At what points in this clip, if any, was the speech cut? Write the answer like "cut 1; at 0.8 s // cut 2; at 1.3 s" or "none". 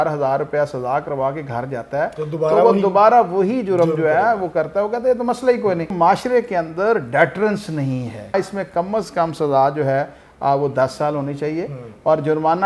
cut 1; at 5.9 s // cut 2; at 8.3 s